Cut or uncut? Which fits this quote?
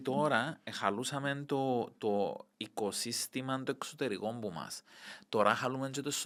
uncut